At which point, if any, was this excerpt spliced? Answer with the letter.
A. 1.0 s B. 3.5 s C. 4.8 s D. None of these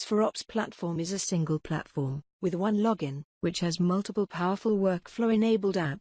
A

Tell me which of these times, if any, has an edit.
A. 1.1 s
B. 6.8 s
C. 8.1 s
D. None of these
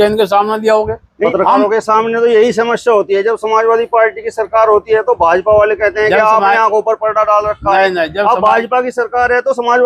A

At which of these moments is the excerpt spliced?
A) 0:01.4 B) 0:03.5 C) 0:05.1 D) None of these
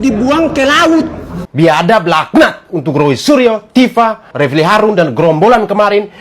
A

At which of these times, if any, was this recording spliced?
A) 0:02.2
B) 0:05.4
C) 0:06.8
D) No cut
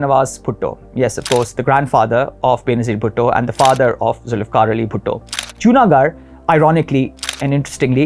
B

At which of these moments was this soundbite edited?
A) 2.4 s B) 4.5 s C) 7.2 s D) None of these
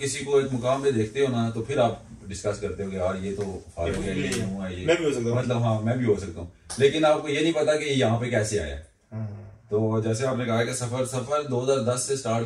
D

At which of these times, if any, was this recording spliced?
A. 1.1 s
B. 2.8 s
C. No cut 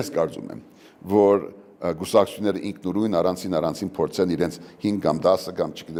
C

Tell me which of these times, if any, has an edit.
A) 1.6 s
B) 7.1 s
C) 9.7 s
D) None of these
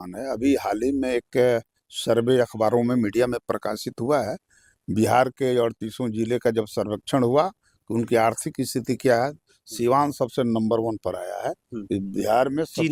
D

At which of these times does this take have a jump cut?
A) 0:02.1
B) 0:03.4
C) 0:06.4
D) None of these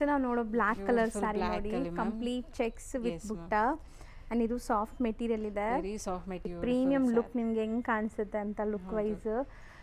C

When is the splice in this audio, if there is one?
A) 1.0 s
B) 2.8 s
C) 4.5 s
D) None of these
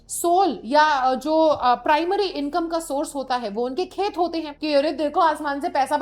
C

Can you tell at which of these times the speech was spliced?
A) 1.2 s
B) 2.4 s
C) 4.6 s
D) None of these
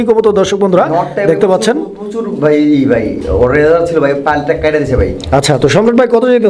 D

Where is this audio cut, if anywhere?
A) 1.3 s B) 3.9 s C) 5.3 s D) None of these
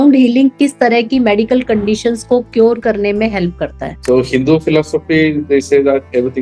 B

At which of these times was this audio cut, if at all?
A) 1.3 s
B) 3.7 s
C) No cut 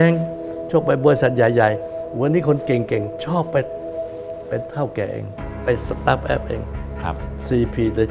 C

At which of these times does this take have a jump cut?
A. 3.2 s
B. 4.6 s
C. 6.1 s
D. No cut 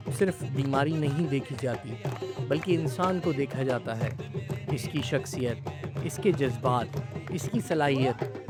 D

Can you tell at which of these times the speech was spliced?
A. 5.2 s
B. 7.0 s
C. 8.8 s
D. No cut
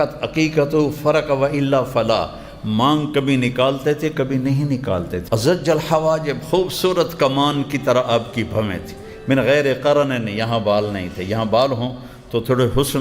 A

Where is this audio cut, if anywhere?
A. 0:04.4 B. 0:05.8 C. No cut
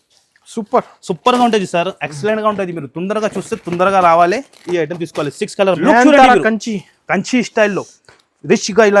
B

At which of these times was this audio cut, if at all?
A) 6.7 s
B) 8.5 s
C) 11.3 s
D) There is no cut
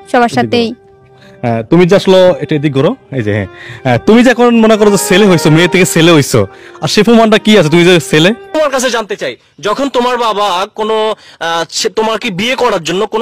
B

